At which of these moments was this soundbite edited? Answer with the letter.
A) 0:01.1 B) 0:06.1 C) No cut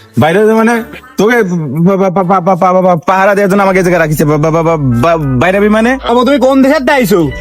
B